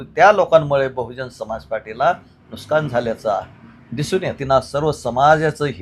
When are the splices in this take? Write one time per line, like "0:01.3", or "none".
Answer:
0:04.4